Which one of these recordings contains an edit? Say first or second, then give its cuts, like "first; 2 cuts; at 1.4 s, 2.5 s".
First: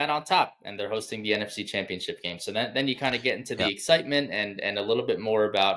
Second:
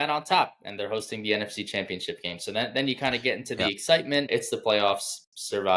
second; 1 cut; at 4.3 s